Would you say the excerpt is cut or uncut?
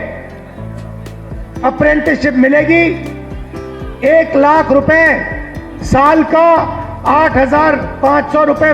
uncut